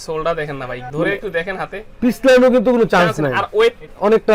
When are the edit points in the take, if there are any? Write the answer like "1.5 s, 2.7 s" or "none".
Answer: none